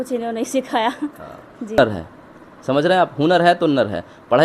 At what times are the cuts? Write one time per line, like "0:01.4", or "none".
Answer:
0:01.8